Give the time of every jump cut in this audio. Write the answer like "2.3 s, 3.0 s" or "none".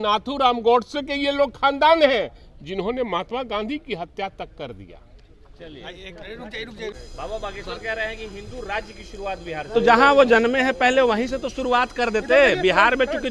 7.0 s